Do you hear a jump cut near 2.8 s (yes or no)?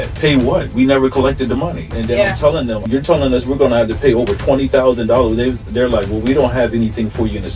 yes